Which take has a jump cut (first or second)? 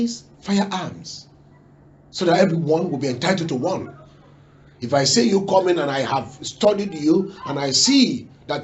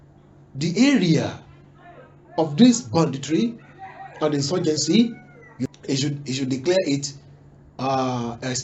second